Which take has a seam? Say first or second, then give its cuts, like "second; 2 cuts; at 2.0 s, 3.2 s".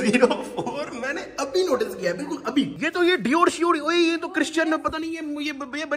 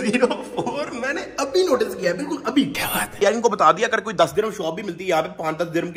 first; 1 cut; at 2.8 s